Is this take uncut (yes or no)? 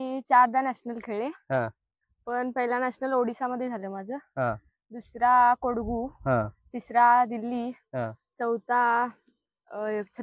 yes